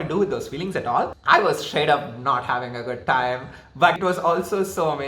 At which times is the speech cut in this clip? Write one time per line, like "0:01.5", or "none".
0:01.2
0:04.0